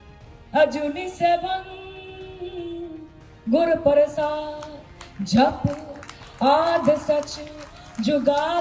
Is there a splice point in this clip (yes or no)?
no